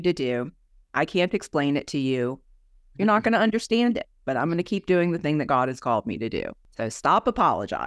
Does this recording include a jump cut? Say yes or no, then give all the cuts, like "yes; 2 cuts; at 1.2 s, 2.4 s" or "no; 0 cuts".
yes; 1 cut; at 6.6 s